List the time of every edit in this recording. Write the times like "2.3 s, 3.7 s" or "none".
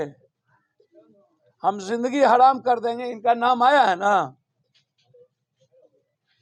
none